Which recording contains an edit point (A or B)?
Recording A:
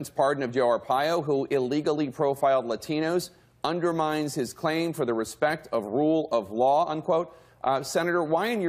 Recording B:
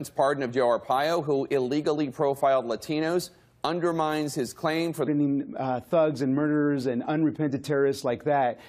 A